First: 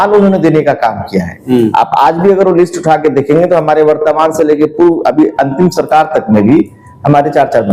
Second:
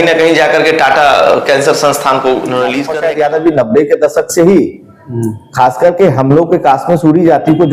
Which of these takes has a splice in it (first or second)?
second